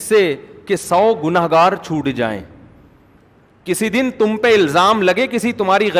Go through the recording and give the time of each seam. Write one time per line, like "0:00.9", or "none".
0:03.2